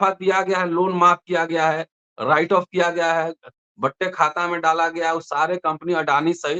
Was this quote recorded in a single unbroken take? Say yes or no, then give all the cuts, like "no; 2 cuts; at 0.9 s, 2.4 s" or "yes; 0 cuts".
yes; 0 cuts